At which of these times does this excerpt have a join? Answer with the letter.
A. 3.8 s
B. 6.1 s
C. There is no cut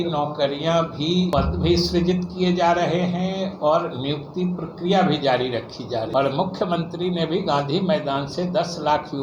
B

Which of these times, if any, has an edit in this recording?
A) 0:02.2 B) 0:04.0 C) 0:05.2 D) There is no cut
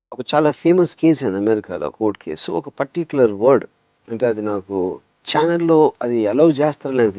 D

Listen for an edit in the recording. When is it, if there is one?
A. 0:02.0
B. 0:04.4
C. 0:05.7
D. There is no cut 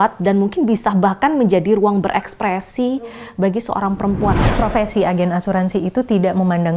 B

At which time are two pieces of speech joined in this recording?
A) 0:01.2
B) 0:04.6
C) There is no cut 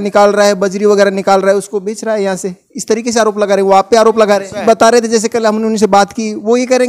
B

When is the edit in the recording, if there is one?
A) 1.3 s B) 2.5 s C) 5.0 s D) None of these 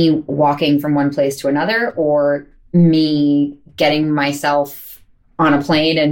B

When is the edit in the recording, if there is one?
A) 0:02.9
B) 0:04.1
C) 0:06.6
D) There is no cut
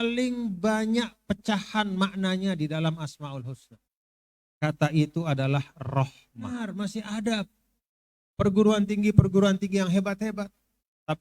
C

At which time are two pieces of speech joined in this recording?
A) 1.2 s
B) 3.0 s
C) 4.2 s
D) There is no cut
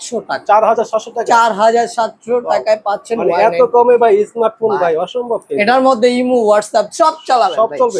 D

